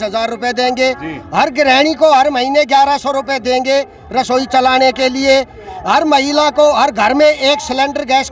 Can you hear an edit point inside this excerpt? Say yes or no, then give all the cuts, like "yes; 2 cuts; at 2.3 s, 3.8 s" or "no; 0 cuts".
no; 0 cuts